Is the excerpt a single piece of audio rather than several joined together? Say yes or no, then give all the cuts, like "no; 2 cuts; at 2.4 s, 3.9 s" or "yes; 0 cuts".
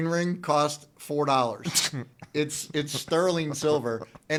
yes; 0 cuts